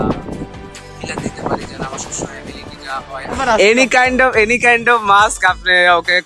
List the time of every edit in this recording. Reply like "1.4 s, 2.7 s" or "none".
3.3 s